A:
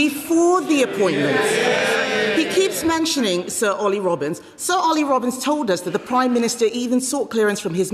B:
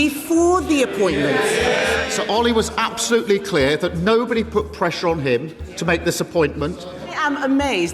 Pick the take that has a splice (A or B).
B